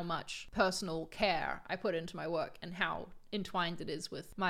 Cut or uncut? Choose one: uncut